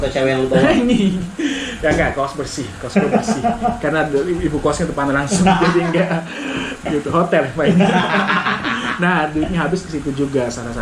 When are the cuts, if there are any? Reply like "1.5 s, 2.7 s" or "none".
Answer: none